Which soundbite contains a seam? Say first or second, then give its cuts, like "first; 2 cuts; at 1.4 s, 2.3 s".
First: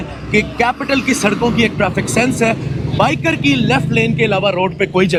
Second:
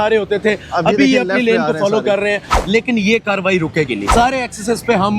second; 2 cuts; at 2.5 s, 4.1 s